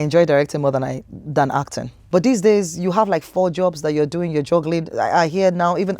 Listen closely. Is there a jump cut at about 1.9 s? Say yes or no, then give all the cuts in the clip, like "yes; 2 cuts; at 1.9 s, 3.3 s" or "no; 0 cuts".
yes; 1 cut; at 1.9 s